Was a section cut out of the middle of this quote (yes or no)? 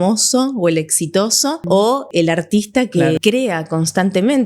yes